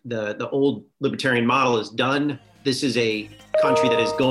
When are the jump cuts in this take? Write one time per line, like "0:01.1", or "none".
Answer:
0:00.9
0:02.5

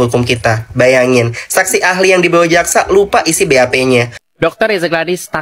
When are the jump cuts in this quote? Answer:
0:04.2

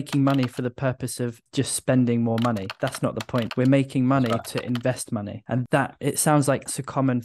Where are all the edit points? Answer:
none

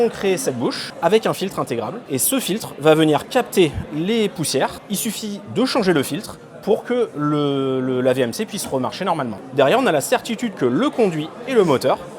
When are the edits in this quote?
0:00.9
0:02.0
0:04.8
0:09.4

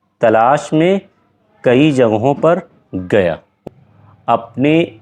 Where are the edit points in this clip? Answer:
0:03.6

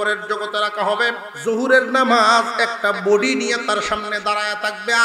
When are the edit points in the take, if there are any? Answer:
0:01.3

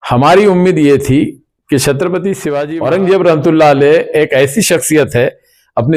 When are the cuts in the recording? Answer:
0:02.7

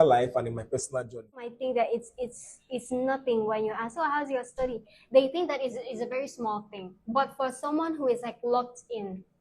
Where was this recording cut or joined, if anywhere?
0:01.5

